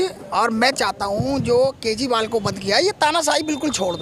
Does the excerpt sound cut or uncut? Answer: uncut